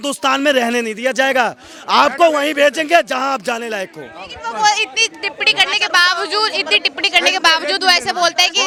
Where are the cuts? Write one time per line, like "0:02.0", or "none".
none